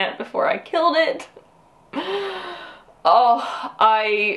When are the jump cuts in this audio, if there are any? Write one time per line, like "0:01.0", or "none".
none